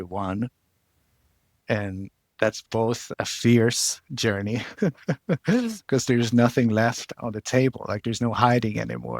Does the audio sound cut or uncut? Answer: cut